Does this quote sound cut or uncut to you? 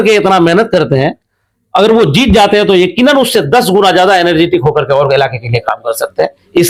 uncut